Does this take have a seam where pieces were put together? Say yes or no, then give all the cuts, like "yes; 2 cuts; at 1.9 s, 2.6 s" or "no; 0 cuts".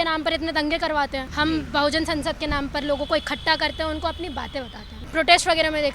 yes; 2 cuts; at 1.3 s, 5.0 s